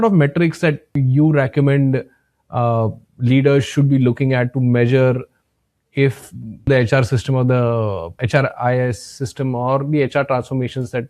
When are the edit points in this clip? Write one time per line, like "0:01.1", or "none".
0:01.0
0:06.7
0:08.2